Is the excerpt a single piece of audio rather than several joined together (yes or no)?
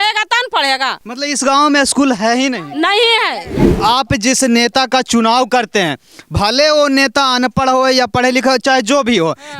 no